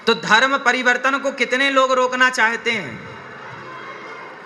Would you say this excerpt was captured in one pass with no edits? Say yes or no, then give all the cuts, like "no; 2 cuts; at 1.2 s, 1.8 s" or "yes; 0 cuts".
yes; 0 cuts